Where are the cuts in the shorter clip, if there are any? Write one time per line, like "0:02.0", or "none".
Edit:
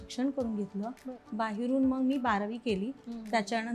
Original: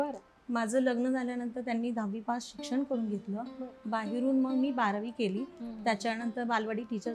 none